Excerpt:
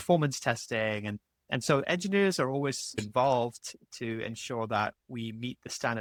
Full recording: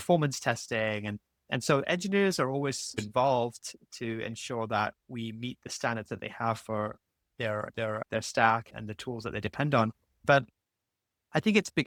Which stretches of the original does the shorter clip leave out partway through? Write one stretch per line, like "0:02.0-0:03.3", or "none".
none